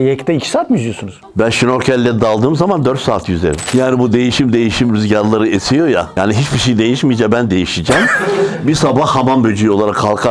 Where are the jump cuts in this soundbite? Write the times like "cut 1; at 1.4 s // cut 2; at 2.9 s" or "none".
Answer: cut 1; at 3.6 s